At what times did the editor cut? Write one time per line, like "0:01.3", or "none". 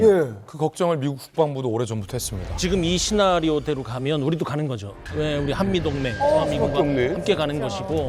0:02.4